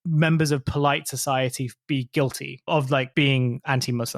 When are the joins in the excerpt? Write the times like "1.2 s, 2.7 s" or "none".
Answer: 3.1 s